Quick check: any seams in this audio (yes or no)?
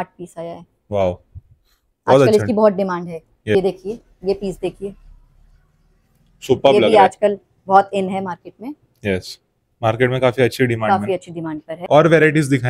yes